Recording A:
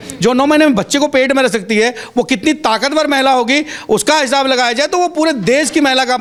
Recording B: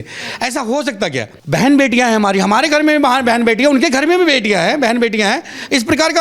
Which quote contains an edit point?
B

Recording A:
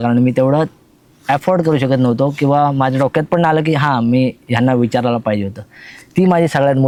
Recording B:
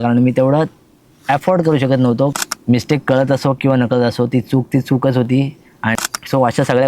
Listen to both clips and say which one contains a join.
B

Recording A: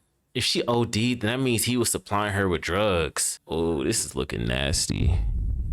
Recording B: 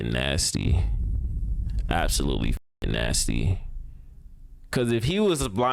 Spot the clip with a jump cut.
A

